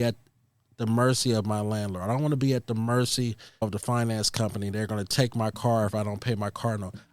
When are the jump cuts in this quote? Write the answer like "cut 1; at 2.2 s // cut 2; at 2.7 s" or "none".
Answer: none